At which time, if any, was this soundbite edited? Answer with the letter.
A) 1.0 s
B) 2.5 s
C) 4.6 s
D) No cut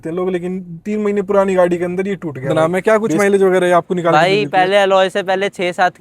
B